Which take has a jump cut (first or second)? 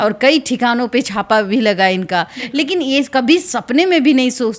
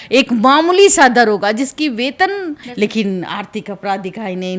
second